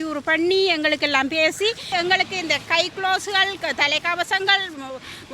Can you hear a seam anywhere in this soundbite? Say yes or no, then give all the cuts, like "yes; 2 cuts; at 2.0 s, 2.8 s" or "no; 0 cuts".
yes; 1 cut; at 1.9 s